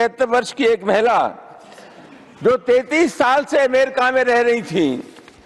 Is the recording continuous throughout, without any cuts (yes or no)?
yes